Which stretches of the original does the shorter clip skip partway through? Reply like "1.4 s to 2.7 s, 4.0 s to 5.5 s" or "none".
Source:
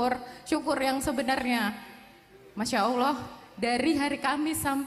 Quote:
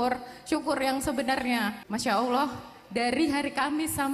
1.8 s to 2.5 s